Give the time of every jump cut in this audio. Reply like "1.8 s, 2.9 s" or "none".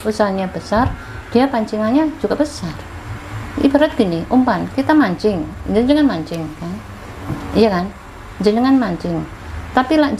none